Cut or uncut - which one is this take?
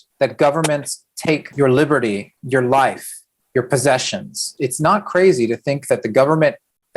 cut